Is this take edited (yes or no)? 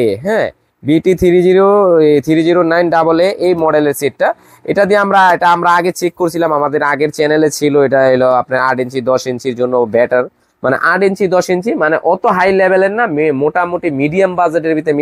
no